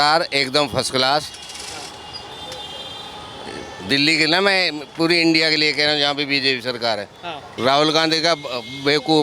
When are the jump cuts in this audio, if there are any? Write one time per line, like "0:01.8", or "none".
0:07.4